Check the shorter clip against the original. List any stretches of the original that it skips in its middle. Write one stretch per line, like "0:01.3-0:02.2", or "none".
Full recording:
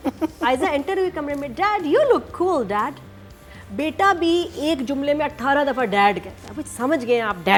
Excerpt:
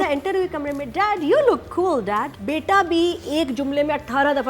0:03.0-0:03.7